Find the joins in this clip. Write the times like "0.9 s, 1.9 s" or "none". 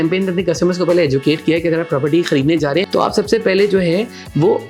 2.9 s